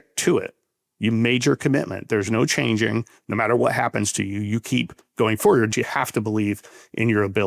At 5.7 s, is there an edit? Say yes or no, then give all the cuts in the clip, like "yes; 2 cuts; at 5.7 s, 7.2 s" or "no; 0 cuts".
yes; 1 cut; at 5.7 s